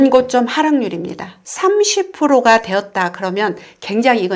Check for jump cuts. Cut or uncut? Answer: cut